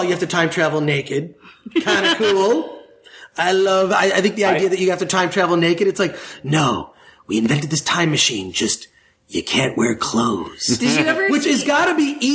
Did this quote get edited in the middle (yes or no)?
no